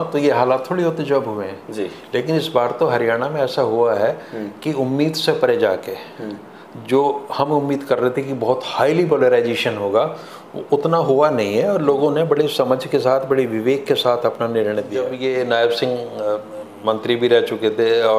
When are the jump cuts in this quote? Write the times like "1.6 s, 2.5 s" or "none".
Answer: 15.1 s